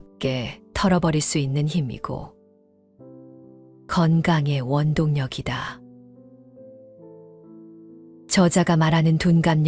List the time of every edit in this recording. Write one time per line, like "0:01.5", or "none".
none